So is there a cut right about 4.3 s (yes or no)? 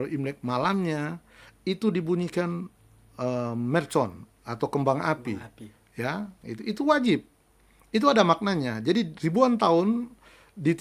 no